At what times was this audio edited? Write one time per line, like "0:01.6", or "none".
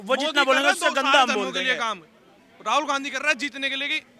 none